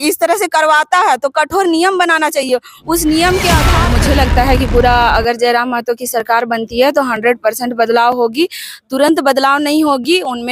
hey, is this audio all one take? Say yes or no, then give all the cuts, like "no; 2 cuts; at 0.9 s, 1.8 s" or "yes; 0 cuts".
no; 1 cut; at 3.8 s